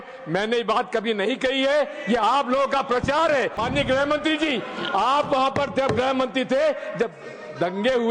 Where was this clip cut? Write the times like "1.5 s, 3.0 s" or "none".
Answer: 3.6 s